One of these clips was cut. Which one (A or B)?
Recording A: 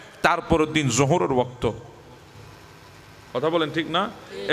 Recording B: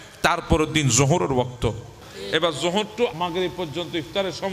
B